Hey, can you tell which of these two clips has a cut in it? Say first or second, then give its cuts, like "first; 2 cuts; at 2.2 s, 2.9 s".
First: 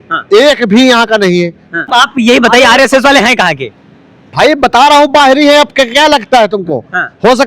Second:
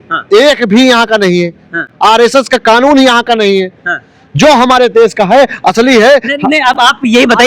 first; 1 cut; at 1.9 s